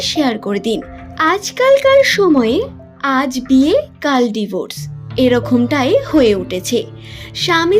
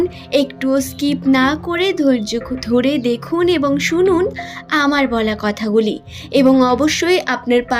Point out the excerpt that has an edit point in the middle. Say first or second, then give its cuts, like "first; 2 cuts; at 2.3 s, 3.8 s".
first; 1 cut; at 1.1 s